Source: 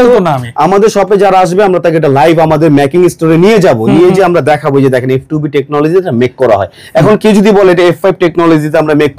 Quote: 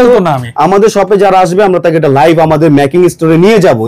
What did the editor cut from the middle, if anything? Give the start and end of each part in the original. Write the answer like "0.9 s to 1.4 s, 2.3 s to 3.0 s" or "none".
none